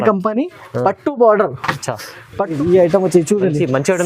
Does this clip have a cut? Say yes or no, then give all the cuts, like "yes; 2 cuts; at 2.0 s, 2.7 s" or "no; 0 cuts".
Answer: yes; 1 cut; at 2.6 s